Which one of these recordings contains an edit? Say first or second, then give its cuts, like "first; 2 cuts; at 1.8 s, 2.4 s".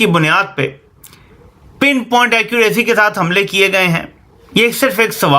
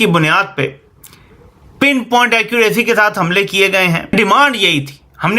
second; 1 cut; at 4.1 s